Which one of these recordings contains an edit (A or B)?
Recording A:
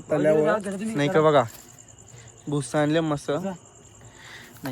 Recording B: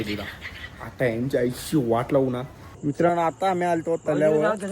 B